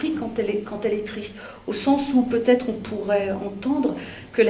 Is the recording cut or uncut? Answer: uncut